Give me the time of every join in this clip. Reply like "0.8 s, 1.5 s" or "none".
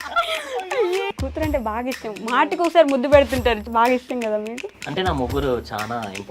1.1 s, 3.6 s

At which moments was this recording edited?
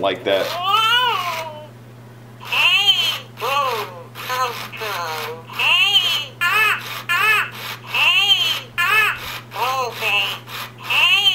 2.4 s

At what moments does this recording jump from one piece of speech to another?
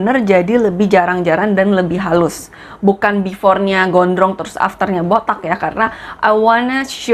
none

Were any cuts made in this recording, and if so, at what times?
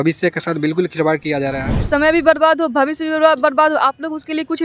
1.7 s

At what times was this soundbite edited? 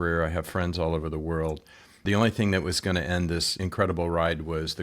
2.0 s, 3.6 s

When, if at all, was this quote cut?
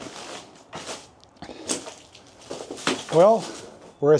none

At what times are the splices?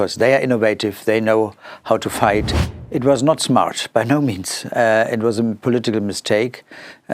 2.6 s

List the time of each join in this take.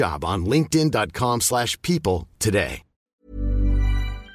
3.2 s

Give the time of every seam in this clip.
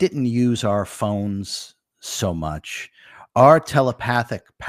none

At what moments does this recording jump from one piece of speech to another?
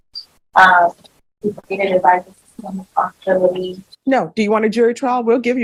none

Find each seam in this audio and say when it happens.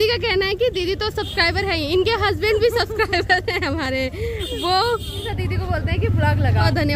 none

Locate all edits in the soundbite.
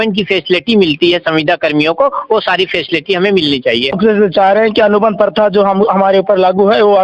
4.0 s

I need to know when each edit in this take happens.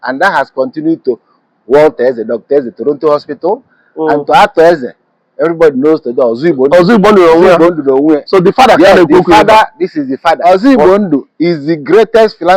10.4 s

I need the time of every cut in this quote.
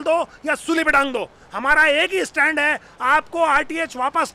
none

